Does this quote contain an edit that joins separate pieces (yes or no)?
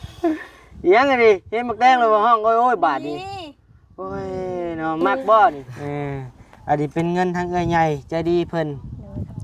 yes